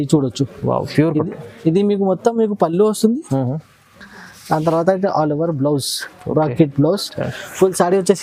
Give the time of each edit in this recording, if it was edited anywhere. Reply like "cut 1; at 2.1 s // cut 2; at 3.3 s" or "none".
none